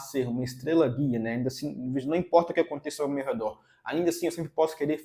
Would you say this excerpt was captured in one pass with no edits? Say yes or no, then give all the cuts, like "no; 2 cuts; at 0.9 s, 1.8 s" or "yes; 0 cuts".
yes; 0 cuts